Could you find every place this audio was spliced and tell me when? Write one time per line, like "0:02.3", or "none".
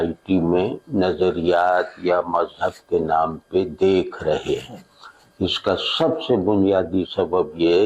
none